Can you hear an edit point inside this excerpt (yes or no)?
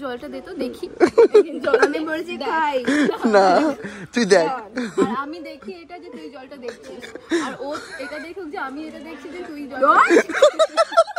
no